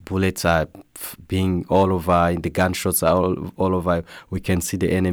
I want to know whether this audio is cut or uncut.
uncut